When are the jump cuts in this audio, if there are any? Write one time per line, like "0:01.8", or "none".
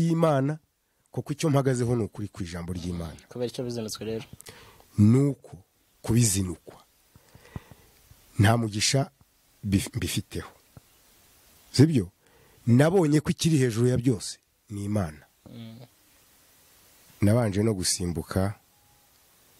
0:16.0